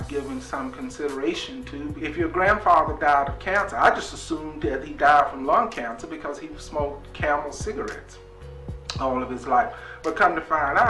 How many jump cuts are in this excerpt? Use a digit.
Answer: 1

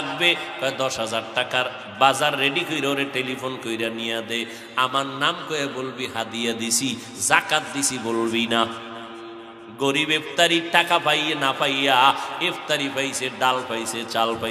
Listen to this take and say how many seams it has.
0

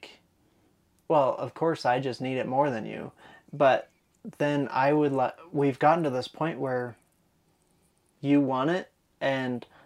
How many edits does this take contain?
0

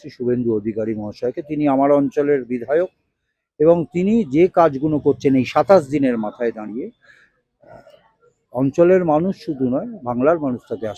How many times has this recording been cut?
0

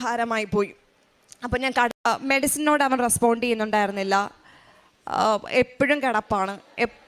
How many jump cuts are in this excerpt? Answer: 1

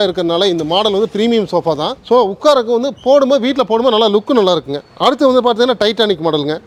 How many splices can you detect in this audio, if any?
0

